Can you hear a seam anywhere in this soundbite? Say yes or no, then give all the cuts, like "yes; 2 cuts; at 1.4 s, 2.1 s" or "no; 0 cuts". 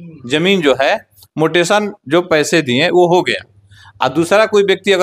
no; 0 cuts